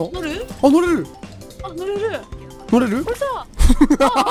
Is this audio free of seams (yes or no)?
yes